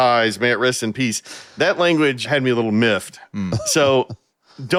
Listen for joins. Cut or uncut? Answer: uncut